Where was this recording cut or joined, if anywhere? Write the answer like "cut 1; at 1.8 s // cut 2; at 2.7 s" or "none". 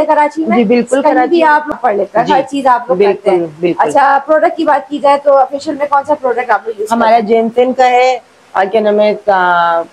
cut 1; at 1.7 s